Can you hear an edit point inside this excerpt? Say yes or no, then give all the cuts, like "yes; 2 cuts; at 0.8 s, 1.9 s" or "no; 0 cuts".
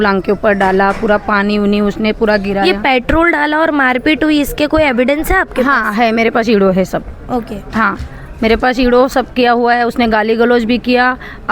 no; 0 cuts